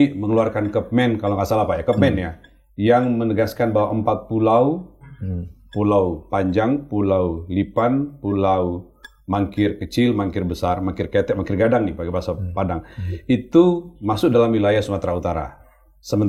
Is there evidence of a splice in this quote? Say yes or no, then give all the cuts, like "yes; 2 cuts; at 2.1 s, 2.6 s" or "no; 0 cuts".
no; 0 cuts